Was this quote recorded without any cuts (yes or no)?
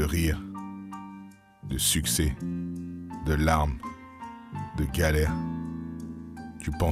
yes